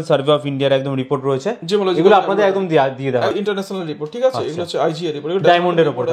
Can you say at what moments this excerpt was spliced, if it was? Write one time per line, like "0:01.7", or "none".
0:03.3